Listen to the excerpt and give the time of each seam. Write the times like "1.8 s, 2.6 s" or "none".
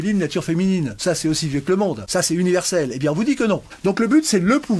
0.9 s, 2.0 s, 3.7 s